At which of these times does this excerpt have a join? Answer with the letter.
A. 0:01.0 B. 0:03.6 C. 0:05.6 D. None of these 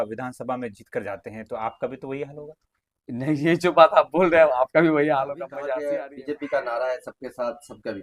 C